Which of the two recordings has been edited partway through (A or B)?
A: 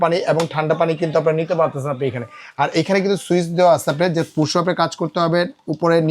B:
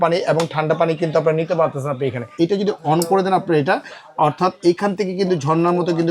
B